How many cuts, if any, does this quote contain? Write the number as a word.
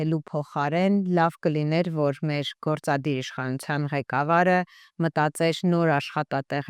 zero